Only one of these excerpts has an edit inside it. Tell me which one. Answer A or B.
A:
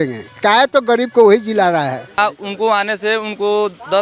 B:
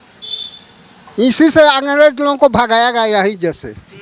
A